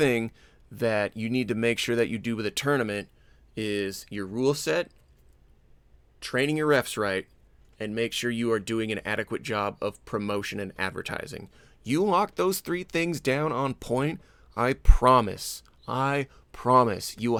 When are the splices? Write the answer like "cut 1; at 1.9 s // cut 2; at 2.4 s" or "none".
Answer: none